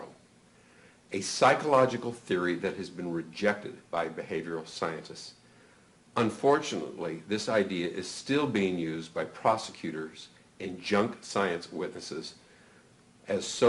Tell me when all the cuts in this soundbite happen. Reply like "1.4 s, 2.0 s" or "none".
8.2 s